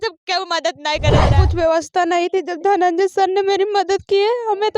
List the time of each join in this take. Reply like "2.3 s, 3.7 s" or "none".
1.3 s